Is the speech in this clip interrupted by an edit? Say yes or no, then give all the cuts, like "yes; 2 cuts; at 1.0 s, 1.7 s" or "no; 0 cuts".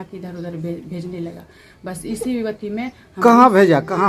no; 0 cuts